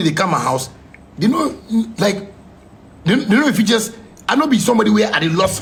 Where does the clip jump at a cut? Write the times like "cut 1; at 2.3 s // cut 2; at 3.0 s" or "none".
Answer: none